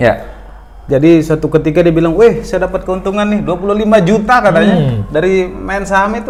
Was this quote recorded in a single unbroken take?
yes; 0 cuts

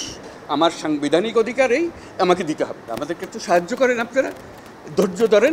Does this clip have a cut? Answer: yes; 1 cut; at 2.9 s

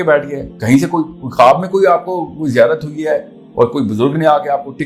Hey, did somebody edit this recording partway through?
no; 0 cuts

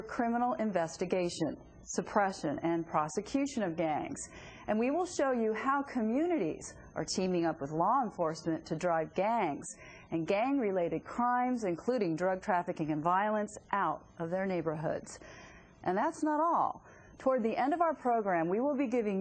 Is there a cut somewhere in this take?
no; 0 cuts

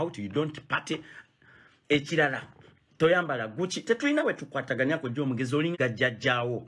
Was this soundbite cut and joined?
yes; 1 cut; at 5.7 s

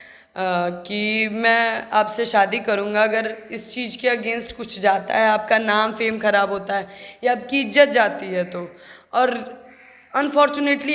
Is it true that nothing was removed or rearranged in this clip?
yes; 0 cuts

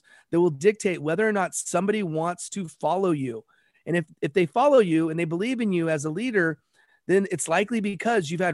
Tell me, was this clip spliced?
no; 0 cuts

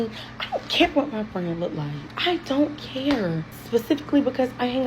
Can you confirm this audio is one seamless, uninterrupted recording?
no; 2 cuts; at 2.0 s, 3.5 s

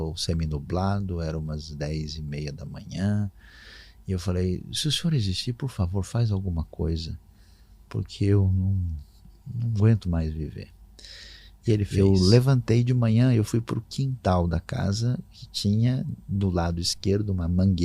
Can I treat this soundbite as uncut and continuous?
no; 1 cut; at 11.9 s

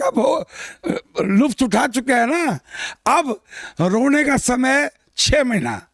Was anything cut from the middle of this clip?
no; 0 cuts

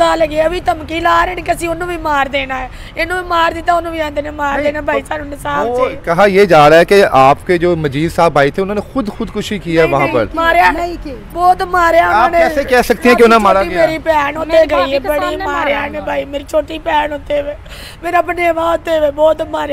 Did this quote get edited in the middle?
no; 0 cuts

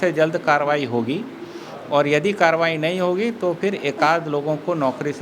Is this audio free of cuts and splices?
yes; 0 cuts

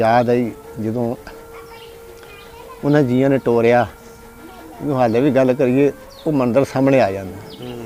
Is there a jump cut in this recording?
no; 0 cuts

